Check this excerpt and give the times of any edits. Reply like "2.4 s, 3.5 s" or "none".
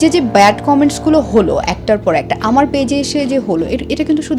none